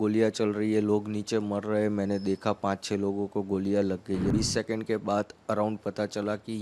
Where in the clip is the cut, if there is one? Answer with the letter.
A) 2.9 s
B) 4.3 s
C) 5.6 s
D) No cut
B